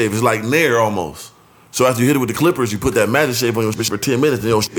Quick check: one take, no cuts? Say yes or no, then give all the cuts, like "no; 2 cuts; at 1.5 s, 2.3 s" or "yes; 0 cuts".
yes; 0 cuts